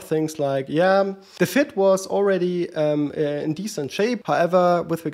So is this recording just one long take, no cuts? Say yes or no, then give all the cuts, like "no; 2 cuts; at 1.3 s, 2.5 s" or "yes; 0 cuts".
no; 2 cuts; at 1.2 s, 4.2 s